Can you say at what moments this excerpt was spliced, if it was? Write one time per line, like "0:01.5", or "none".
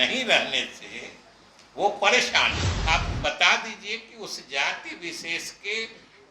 0:02.7